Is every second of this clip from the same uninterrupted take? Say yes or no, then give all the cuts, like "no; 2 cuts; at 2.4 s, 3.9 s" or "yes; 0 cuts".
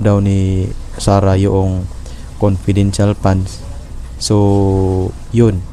yes; 0 cuts